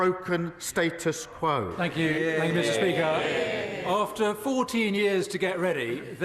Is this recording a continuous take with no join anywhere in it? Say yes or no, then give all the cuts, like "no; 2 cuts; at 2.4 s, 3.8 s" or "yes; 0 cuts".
no; 1 cut; at 1.9 s